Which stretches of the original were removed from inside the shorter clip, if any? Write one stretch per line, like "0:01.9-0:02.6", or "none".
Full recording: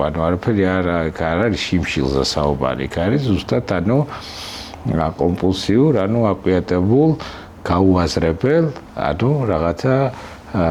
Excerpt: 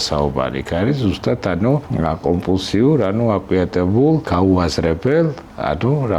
0:04.1-0:04.8
0:07.2-0:07.6